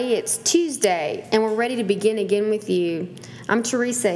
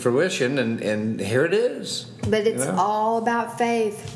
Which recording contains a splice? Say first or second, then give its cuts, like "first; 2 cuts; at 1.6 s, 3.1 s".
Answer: first; 1 cut; at 1.2 s